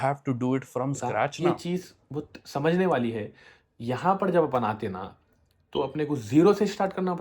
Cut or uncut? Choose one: cut